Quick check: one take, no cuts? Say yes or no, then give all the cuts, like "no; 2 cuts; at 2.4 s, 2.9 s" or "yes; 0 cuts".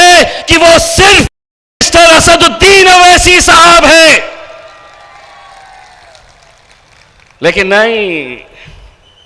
yes; 0 cuts